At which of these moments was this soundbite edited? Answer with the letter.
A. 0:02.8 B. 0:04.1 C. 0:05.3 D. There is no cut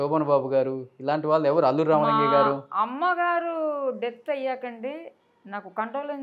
D